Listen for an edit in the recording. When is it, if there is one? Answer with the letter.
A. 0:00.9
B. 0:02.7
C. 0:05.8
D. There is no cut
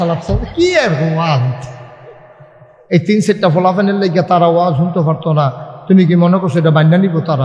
B